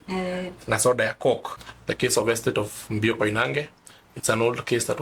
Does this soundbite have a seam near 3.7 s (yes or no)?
no